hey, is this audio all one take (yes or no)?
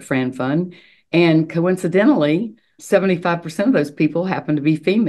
no